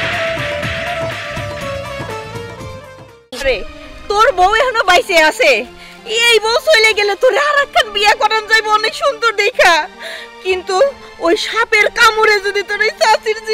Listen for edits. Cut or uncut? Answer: cut